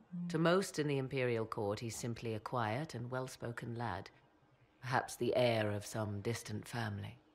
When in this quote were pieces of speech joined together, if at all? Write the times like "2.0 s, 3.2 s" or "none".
5.8 s